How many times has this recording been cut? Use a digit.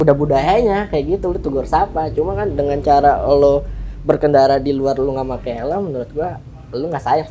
0